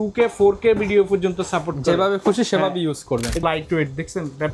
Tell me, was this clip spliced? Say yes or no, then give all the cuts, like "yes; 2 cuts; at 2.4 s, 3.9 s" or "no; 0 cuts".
yes; 1 cut; at 3.4 s